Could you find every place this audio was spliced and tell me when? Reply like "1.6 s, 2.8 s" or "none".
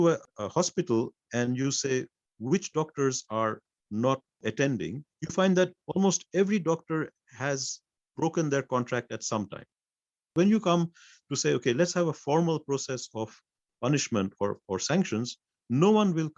10.3 s